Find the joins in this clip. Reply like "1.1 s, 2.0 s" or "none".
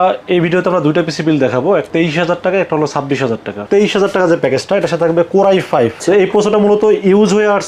1.9 s, 3.6 s, 6.0 s